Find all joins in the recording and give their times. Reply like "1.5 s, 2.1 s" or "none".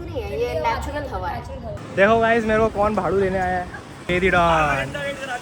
1.9 s, 4.0 s